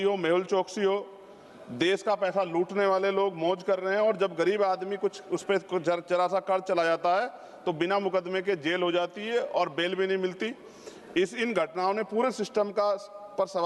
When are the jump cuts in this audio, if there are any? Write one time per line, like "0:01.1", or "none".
none